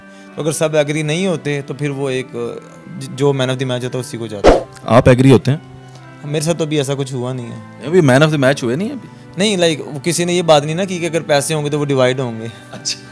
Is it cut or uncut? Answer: uncut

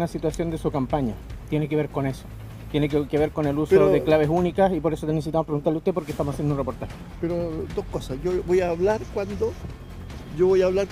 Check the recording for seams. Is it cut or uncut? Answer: uncut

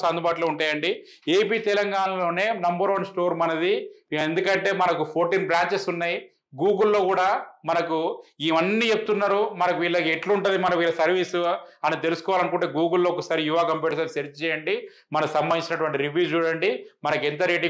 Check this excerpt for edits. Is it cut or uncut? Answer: uncut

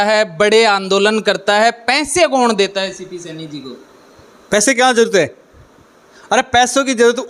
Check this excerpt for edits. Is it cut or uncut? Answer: uncut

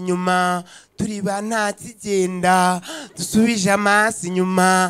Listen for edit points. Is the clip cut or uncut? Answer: uncut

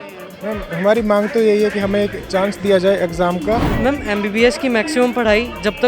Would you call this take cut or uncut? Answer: cut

